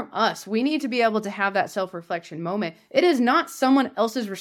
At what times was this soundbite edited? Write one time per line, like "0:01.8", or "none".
none